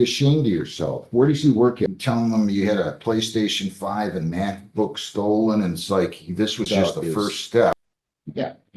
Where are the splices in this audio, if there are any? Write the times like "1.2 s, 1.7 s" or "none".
1.9 s, 7.7 s